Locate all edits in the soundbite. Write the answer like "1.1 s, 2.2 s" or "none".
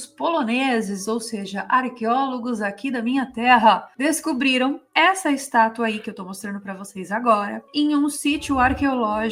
none

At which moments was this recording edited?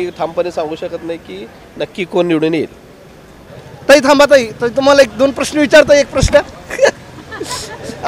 3.4 s

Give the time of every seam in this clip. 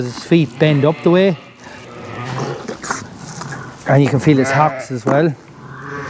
1.7 s

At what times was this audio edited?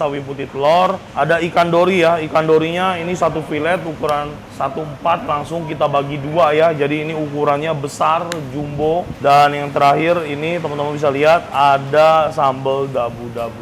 1.0 s, 4.4 s, 9.1 s

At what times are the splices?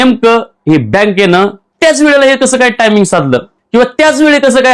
1.6 s, 3.5 s

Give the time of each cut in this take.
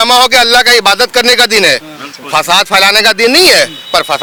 none

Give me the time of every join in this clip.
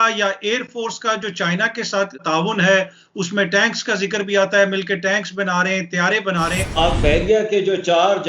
2.2 s, 6.8 s

